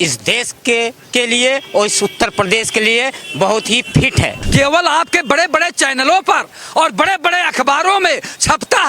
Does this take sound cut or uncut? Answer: cut